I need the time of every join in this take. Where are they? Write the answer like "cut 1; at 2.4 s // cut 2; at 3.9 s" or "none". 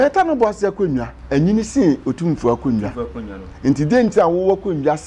cut 1; at 1.1 s